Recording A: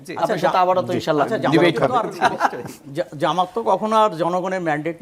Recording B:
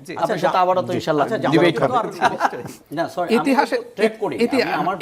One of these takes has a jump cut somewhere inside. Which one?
B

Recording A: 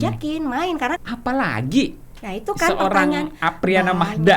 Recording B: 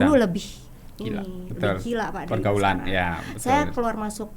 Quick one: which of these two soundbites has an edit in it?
A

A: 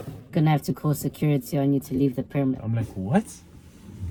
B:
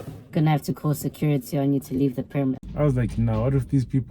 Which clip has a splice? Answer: B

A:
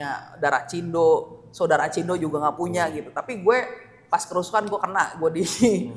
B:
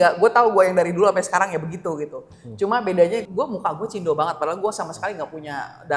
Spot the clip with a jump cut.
B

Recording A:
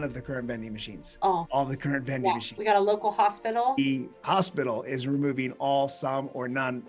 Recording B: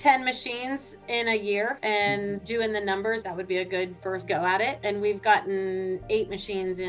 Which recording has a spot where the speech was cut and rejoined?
A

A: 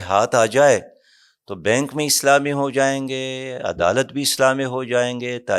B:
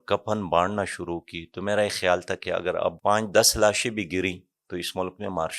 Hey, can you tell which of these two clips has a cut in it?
B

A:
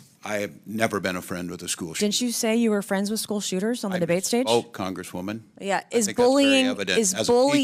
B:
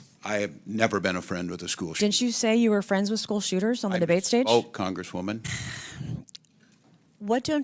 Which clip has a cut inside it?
B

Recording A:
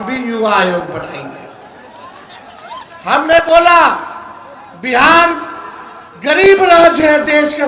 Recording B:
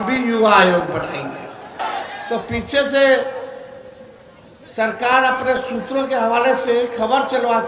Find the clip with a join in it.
B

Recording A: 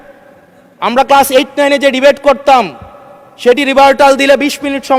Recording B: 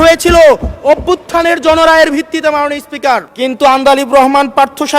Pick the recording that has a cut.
B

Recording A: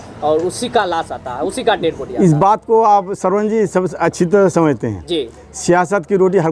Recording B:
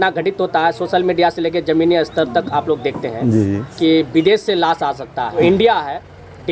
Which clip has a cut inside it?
B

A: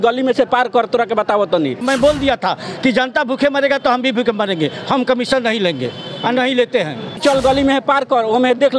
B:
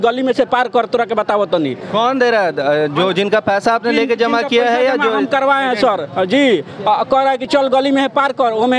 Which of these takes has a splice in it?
A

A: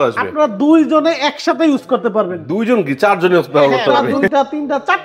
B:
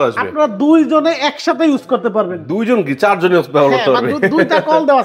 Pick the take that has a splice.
A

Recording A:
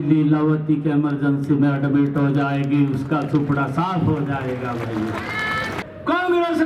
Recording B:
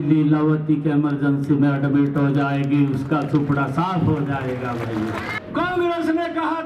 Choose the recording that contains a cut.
B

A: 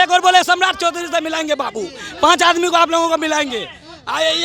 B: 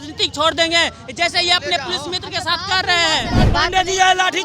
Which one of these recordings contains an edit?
B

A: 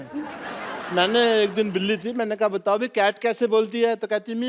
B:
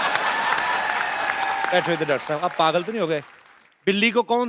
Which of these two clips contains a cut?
B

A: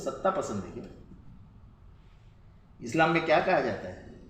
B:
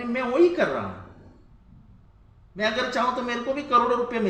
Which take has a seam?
A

